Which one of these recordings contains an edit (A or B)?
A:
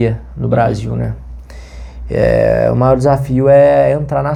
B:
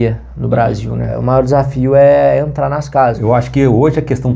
B